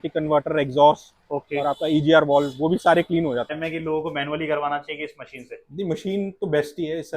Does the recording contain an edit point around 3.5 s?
yes; 1 cut; at 3.5 s

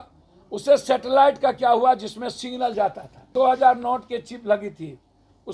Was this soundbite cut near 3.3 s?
yes; 1 cut; at 3.3 s

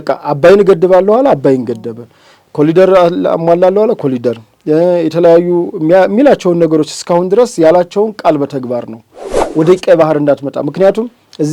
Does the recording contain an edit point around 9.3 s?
yes; 1 cut; at 9.3 s

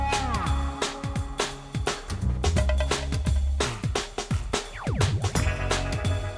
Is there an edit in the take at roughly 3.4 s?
yes; 1 cut; at 3.4 s

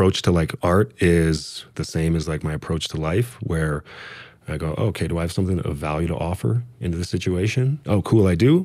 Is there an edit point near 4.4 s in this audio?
no; 2 cuts; at 1.8 s, 7.8 s

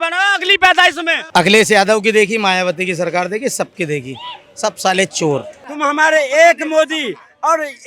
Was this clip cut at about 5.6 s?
yes; 2 cuts; at 1.2 s, 5.6 s

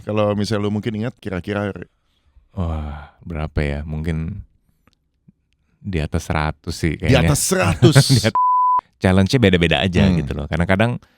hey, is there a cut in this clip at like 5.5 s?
no; 2 cuts; at 1.2 s, 8.5 s

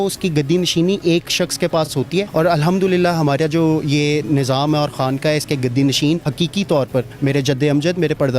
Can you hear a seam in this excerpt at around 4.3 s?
no; 3 cuts; at 1.9 s, 6.3 s, 7.1 s

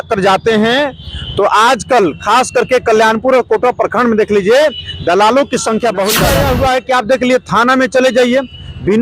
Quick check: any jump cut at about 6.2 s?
yes; 1 cut; at 6.2 s

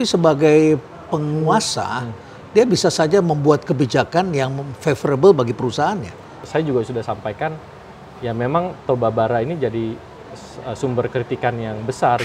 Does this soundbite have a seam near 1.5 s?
yes; 2 cuts; at 1.5 s, 6.4 s

